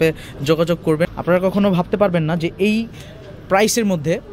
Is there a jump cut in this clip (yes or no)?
yes